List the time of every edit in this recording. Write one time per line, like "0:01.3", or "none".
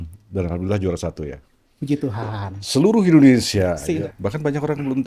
0:03.9